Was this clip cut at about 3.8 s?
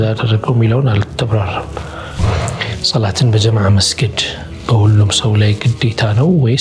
no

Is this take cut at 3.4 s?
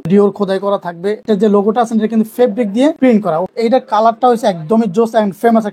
yes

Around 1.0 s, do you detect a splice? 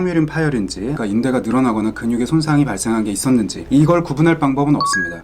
yes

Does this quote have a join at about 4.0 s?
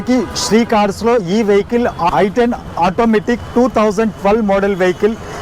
no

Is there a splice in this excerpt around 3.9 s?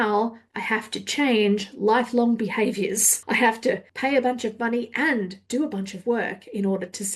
yes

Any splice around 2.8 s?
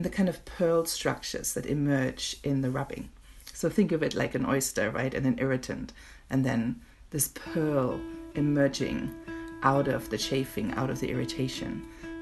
no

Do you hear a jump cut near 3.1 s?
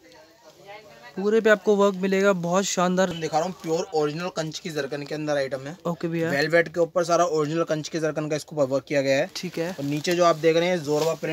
yes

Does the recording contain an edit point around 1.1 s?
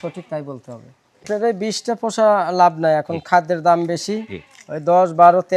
yes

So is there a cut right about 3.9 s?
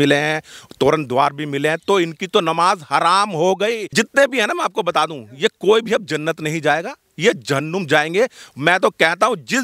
yes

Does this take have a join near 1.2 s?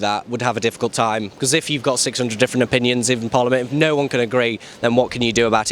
no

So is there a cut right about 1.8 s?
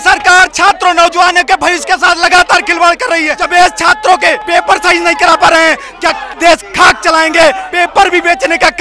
no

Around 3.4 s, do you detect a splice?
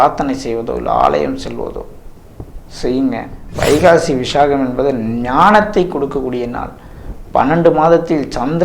yes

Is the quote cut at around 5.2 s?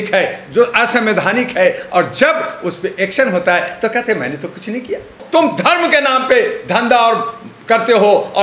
yes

